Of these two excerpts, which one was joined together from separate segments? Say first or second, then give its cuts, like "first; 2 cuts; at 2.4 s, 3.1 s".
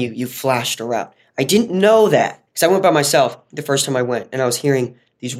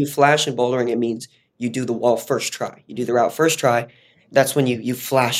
first; 2 cuts; at 2.4 s, 3.5 s